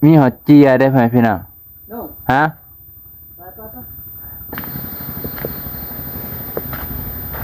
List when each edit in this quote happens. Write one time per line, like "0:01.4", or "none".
0:04.5

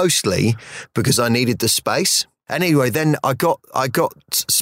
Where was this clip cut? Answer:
0:02.4

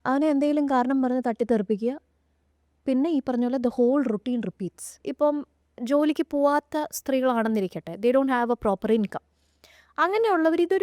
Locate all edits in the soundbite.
0:05.0

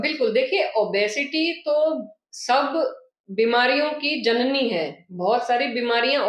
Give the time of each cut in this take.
none

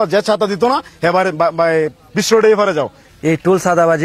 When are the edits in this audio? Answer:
0:03.0

